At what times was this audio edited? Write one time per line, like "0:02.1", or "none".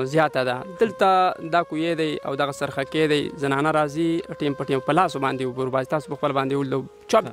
none